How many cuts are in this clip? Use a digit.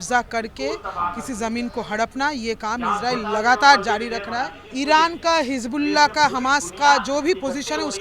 1